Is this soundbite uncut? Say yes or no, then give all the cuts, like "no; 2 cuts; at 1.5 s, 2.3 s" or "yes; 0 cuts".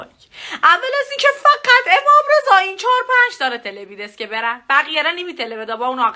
yes; 0 cuts